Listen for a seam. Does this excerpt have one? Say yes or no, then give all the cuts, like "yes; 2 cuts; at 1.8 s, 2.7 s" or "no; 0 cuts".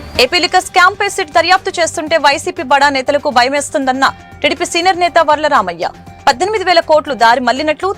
no; 0 cuts